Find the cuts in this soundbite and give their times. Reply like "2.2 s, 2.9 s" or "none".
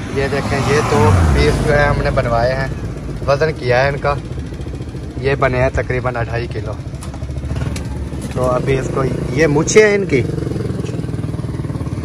none